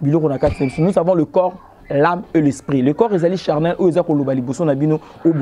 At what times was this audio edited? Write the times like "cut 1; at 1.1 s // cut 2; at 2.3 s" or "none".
none